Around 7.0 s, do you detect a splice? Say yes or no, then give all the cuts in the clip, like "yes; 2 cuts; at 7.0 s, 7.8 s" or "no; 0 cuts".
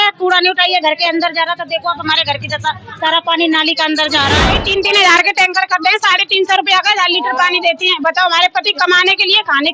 no; 1 cut; at 4.6 s